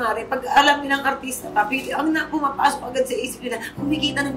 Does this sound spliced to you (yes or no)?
no